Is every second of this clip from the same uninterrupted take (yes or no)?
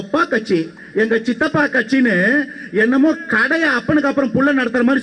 yes